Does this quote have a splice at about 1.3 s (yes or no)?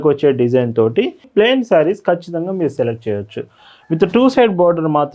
yes